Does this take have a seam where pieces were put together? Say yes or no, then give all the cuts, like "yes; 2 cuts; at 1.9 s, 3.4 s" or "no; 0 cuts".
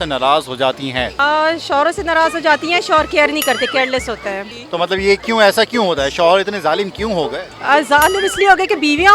yes; 2 cuts; at 1.1 s, 4.5 s